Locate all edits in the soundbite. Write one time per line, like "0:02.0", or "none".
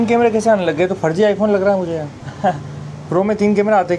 0:02.2